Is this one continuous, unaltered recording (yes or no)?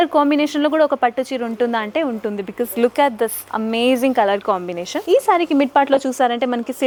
yes